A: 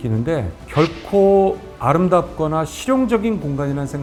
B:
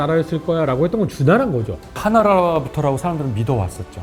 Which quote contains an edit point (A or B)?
B